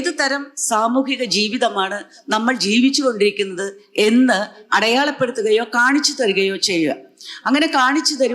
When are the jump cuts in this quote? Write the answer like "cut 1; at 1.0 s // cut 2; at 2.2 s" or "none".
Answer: none